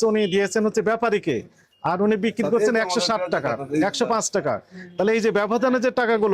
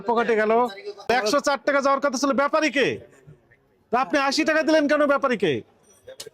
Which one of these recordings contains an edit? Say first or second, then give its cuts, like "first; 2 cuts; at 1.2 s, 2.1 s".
second; 1 cut; at 1.1 s